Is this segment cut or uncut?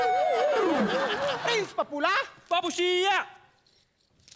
cut